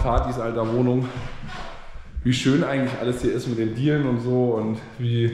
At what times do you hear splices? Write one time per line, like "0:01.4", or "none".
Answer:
none